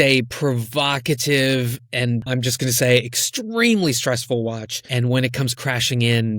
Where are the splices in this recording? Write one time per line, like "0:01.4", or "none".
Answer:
0:02.2
0:04.8